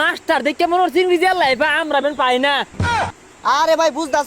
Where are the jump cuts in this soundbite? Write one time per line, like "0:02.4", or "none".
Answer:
0:02.9